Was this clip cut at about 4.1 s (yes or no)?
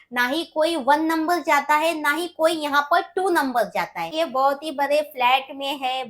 yes